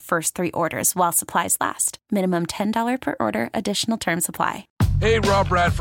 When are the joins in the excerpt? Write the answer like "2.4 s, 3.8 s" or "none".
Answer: 4.6 s